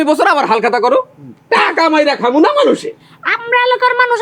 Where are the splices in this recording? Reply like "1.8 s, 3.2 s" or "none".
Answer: 2.9 s